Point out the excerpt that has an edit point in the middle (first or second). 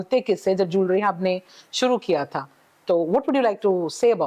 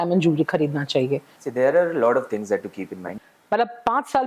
second